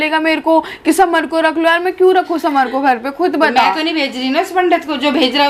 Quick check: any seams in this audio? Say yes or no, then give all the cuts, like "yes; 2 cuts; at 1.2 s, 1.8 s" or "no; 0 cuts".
no; 0 cuts